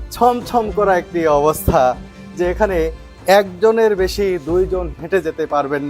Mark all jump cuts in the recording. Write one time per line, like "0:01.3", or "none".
0:05.0